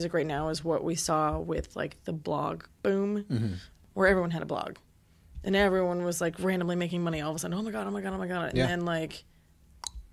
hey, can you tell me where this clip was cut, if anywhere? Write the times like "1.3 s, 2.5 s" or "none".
2.7 s